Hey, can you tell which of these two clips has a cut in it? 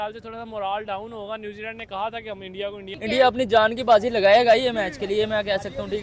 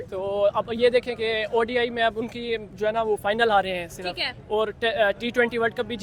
first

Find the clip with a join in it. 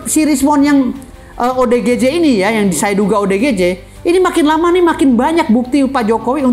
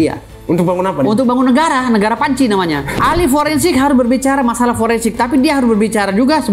second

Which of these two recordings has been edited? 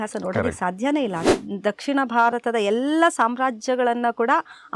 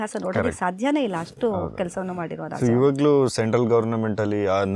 first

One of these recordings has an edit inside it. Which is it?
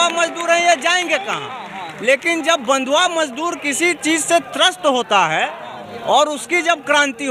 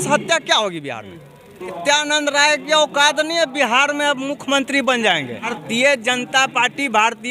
second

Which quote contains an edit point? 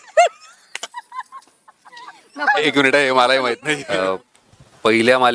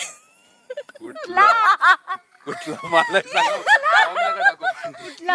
first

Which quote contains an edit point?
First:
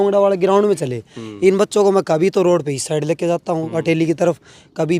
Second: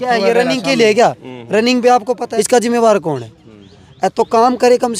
second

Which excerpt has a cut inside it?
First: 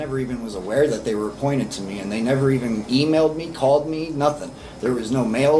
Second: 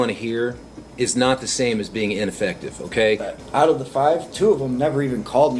second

